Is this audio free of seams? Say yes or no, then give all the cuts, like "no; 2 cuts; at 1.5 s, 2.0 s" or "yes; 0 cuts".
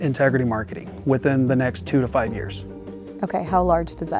yes; 0 cuts